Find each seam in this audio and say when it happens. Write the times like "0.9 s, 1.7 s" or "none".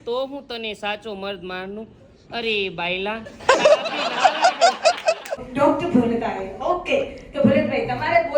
5.4 s